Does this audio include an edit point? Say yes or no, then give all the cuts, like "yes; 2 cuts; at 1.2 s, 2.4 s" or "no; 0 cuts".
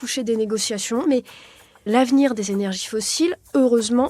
yes; 1 cut; at 1.0 s